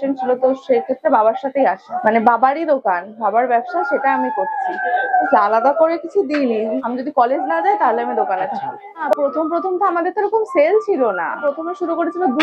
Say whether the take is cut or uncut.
cut